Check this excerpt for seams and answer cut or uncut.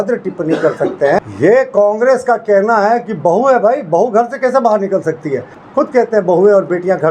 cut